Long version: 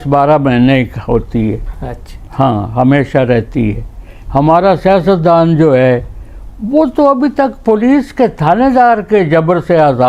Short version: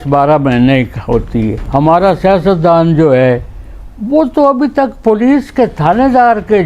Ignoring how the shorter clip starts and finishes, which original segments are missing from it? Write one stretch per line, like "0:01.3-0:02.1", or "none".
0:01.6-0:04.2

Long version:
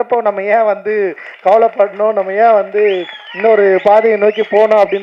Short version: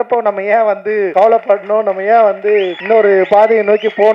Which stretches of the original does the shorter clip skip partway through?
0:01.1-0:01.4
0:03.1-0:03.3

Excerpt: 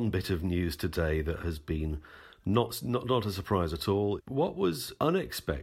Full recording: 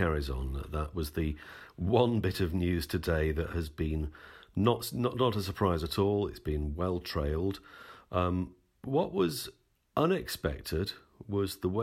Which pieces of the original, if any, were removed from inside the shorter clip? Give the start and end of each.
0:06.5-0:09.3

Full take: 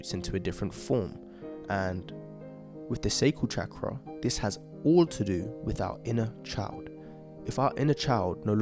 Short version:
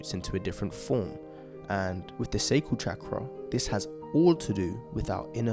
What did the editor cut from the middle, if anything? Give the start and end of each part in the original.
0:02.1-0:02.8

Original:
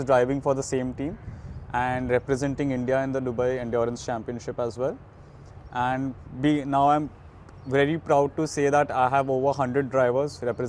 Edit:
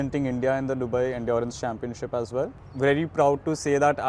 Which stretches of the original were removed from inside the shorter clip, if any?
0:05.1-0:07.5

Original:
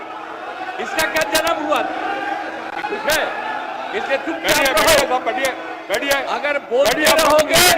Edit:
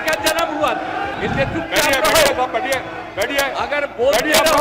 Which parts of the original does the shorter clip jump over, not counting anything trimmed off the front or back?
0:02.2-0:03.9

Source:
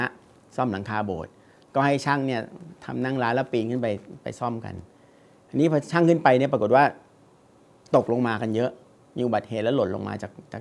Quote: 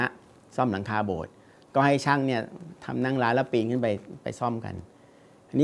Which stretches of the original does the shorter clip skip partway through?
none

